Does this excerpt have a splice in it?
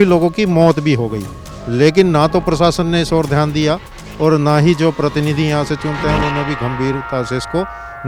no; 0 cuts

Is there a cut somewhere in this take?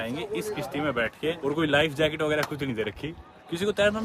no; 0 cuts

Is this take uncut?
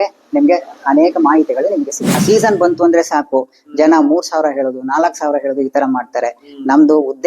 no; 1 cut; at 2.1 s

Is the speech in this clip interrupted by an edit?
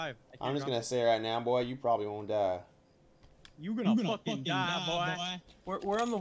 no; 0 cuts

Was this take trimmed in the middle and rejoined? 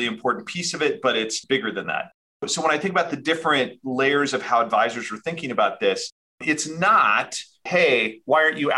no; 0 cuts

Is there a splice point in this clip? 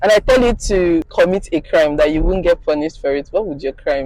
no; 0 cuts

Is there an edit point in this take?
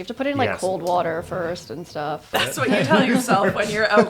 yes; 1 cut; at 2.2 s

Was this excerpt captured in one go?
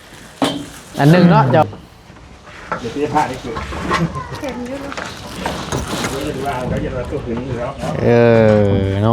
no; 1 cut; at 1.6 s

